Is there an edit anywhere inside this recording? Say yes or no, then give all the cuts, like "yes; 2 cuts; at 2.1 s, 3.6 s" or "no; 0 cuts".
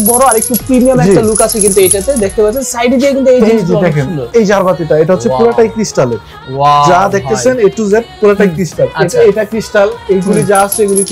no; 0 cuts